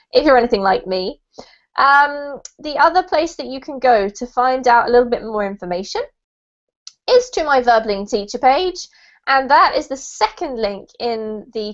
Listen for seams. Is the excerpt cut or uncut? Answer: cut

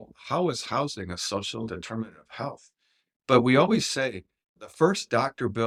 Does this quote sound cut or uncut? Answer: uncut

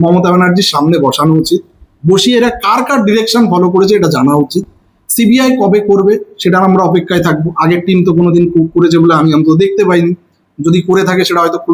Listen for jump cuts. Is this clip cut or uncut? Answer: uncut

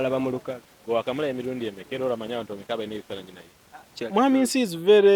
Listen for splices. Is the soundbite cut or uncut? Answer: cut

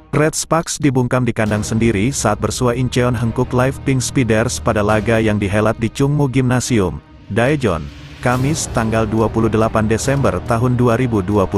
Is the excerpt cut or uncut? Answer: uncut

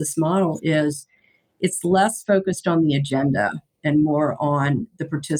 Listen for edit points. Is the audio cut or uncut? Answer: uncut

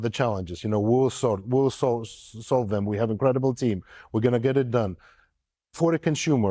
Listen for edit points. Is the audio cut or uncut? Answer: uncut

